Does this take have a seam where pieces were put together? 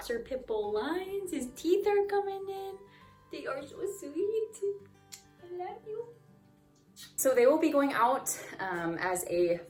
no; 0 cuts

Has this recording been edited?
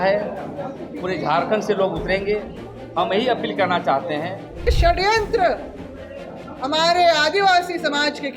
yes; 1 cut; at 4.7 s

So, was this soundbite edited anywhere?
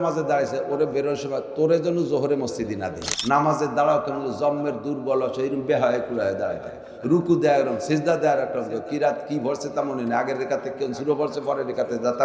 yes; 1 cut; at 3.1 s

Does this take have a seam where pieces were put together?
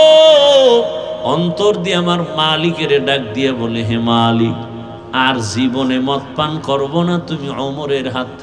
yes; 1 cut; at 1.2 s

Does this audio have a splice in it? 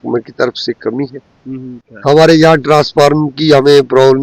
yes; 1 cut; at 1.9 s

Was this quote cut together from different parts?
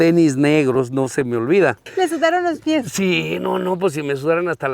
yes; 1 cut; at 1.8 s

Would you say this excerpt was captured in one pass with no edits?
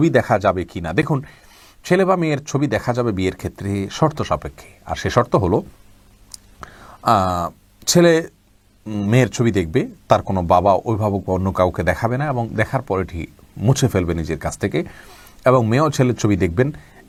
yes; 0 cuts

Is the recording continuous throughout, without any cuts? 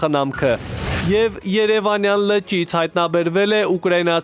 yes; 0 cuts

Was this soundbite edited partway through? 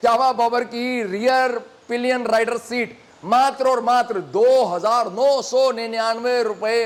no; 0 cuts

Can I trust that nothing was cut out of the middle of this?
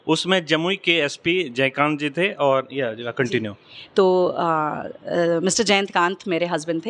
yes; 0 cuts

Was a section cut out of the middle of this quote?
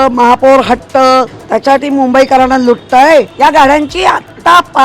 yes; 2 cuts; at 1.4 s, 3.3 s

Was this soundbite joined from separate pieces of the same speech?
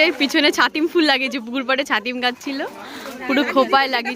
no; 0 cuts

